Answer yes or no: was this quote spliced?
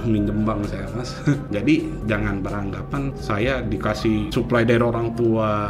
yes